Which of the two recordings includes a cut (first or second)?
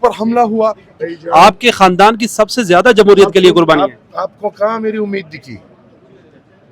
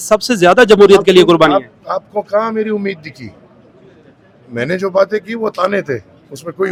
first